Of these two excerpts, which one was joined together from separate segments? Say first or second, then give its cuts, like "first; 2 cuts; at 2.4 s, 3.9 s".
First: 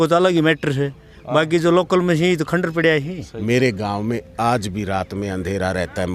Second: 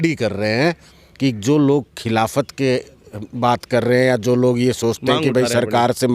first; 1 cut; at 3.3 s